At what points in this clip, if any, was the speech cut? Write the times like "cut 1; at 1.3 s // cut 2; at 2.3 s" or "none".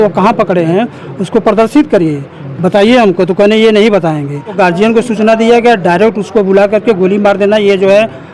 cut 1; at 4.6 s